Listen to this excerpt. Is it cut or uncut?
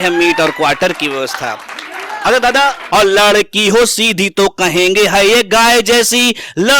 cut